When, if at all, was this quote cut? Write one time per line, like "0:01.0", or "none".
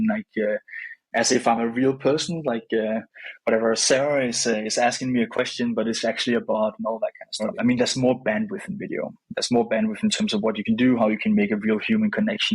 0:07.5

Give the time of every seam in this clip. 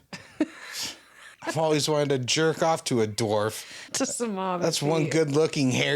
0:01.3
0:03.9

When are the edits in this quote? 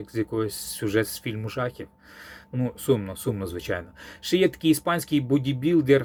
none

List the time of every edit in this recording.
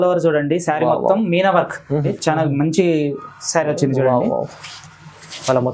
0:02.1

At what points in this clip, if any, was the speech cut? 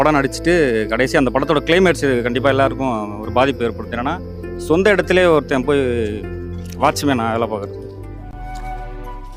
none

